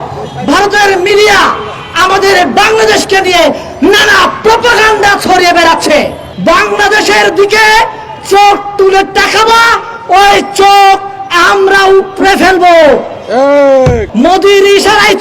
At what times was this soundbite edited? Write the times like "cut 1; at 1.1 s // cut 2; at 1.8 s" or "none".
cut 1; at 6.2 s // cut 2; at 14.0 s